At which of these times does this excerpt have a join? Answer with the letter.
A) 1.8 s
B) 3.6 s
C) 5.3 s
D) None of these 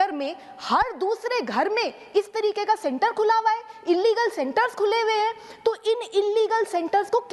D